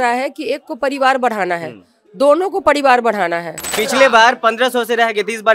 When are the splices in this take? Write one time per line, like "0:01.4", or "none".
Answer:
0:03.7